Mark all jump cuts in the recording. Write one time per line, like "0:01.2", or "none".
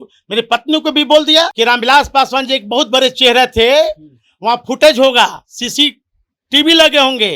0:01.5